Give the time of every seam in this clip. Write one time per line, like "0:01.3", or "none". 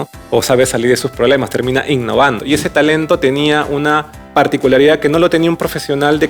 0:02.4